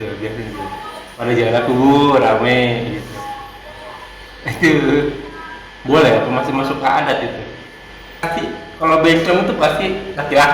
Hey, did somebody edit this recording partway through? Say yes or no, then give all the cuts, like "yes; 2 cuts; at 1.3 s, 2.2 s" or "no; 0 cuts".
yes; 1 cut; at 8.3 s